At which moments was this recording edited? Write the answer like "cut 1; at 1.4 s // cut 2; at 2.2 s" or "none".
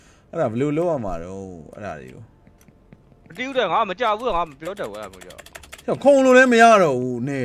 none